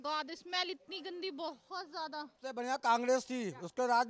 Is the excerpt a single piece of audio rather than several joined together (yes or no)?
no